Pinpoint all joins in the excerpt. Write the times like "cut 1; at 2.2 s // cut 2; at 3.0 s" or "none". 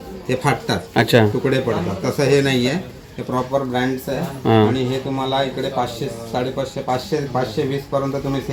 none